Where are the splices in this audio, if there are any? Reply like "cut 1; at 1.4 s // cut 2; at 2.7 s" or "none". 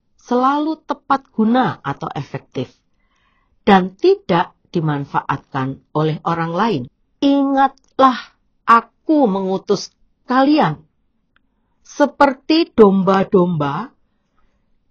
cut 1; at 7.0 s